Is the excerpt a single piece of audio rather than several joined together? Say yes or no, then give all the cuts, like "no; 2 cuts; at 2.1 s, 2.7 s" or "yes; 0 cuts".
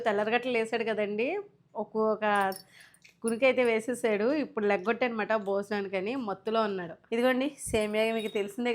no; 1 cut; at 6.9 s